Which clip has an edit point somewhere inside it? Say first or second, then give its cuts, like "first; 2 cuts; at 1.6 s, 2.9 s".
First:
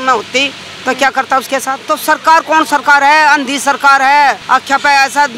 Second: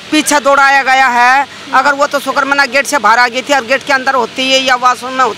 first; 2 cuts; at 1.8 s, 4.4 s